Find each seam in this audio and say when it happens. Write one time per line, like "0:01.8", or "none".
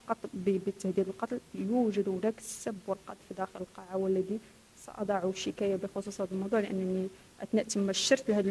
none